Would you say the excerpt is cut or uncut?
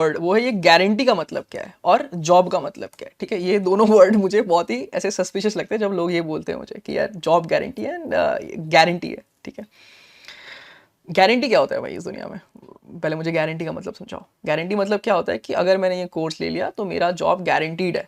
uncut